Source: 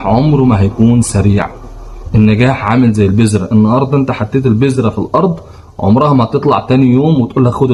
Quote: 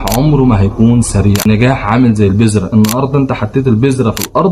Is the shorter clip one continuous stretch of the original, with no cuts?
no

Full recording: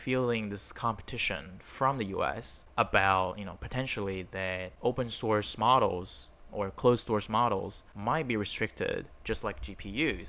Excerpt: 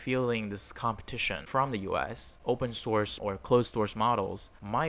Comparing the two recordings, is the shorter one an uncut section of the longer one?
no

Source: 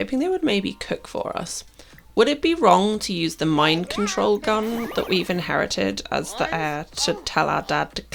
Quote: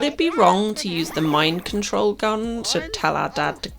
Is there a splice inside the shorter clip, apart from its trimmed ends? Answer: yes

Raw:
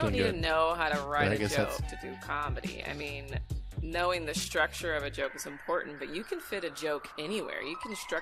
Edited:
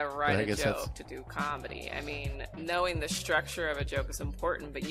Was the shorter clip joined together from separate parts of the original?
yes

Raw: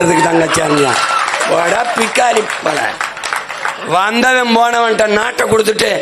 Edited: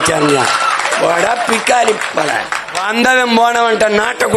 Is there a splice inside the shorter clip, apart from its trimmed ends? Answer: yes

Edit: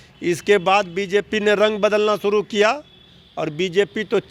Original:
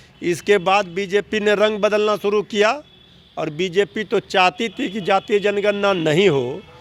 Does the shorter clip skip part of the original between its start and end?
no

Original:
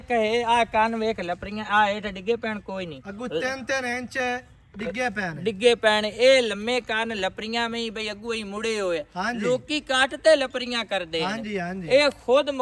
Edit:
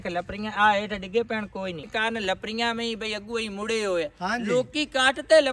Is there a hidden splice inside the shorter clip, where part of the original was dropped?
yes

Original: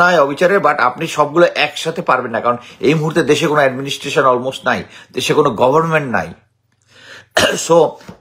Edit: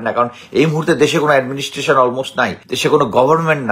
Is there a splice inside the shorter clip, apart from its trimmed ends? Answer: yes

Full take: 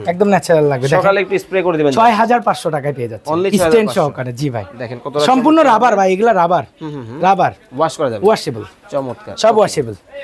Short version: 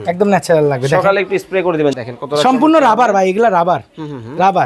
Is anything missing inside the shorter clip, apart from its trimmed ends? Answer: yes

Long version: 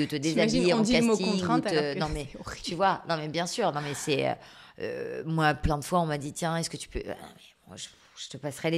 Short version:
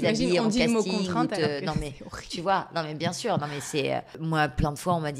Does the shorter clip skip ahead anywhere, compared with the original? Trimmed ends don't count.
yes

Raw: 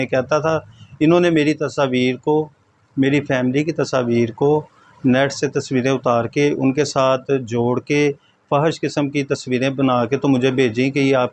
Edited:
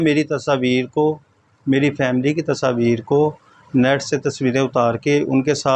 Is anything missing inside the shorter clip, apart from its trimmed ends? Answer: no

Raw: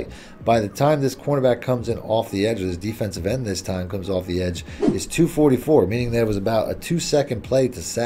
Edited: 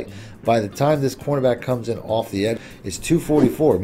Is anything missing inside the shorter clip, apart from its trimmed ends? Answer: yes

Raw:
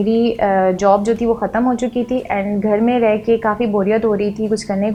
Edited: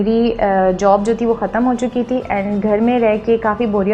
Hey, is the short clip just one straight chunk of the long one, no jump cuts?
yes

